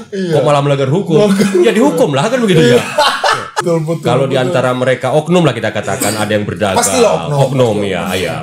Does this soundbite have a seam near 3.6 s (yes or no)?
yes